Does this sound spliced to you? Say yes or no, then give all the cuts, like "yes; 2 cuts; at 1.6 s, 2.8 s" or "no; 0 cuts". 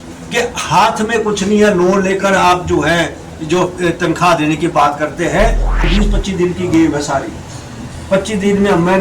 yes; 1 cut; at 5.8 s